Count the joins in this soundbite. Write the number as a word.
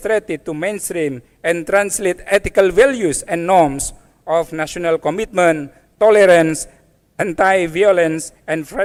zero